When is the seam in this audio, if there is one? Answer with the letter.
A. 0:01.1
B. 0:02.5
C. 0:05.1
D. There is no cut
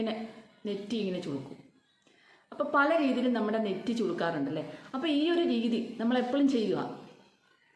D